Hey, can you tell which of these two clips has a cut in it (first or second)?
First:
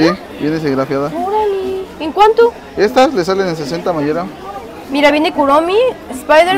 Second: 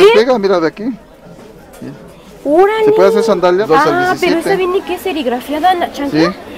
second